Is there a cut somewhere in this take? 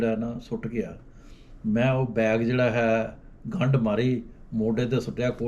no; 0 cuts

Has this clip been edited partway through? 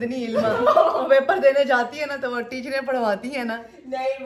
no; 0 cuts

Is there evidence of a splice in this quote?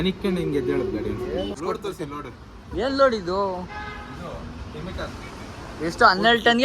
yes; 1 cut; at 1.6 s

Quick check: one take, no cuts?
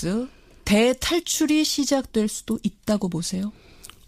yes; 0 cuts

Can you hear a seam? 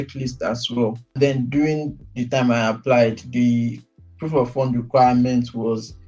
yes; 1 cut; at 1.2 s

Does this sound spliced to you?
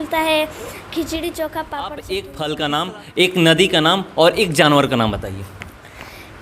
yes; 1 cut; at 2.0 s

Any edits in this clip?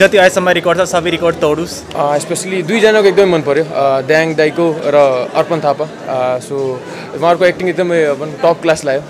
yes; 1 cut; at 1.8 s

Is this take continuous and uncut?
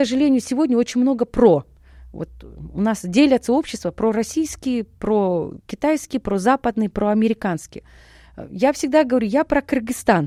yes; 0 cuts

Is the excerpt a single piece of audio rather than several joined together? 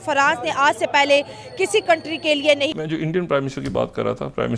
no; 1 cut; at 2.8 s

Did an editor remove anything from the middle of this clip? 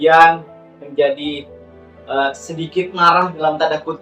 no; 0 cuts

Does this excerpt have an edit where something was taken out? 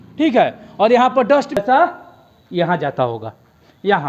yes; 1 cut; at 1.6 s

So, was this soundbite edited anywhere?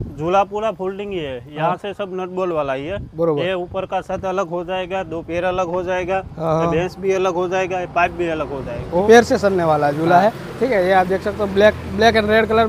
yes; 1 cut; at 9.0 s

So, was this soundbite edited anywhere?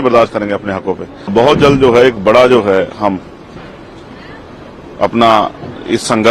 yes; 1 cut; at 1.3 s

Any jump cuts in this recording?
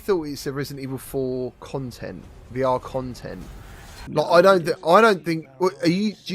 no; 0 cuts

